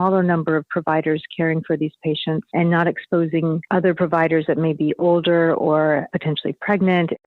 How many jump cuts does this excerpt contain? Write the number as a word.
three